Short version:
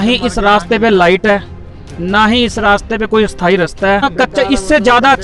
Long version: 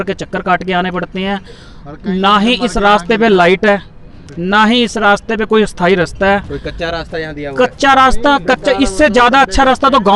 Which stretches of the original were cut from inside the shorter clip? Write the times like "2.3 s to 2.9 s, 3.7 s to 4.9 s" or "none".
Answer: 6.4 s to 8.3 s